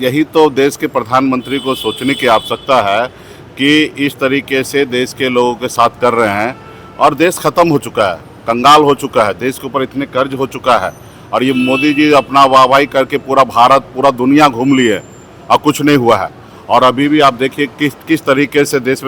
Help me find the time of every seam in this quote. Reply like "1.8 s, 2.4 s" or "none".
none